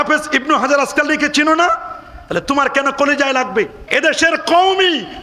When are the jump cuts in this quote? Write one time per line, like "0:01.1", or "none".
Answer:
0:03.8